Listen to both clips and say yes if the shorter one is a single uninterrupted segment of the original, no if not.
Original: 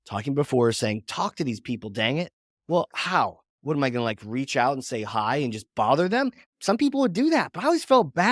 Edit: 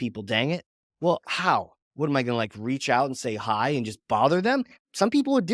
yes